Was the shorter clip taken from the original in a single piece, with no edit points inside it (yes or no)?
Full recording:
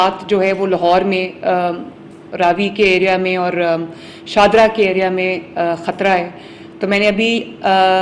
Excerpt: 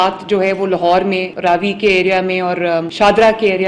no